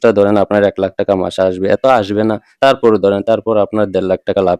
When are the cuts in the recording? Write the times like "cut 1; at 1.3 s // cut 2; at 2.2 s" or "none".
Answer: none